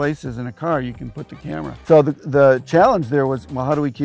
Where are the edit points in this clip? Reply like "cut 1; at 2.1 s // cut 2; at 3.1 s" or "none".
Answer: cut 1; at 1.8 s